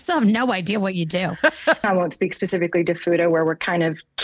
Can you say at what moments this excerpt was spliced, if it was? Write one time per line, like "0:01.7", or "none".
0:01.8